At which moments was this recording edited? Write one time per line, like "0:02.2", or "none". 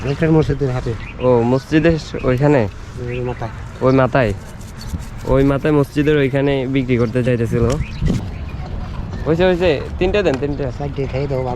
0:08.2

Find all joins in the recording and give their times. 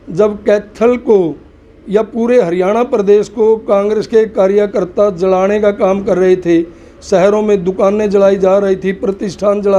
none

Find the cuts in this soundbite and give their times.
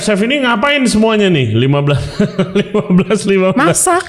none

